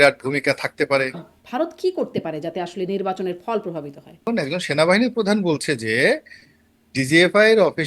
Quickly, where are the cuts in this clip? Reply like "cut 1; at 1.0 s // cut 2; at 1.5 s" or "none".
cut 1; at 1.4 s // cut 2; at 4.3 s